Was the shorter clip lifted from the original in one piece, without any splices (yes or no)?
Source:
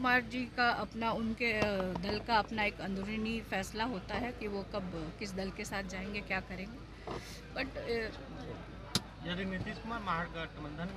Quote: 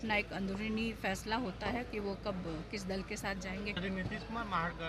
no